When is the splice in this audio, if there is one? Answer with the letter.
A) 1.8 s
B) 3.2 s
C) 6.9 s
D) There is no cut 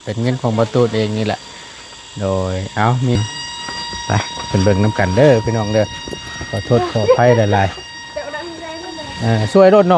B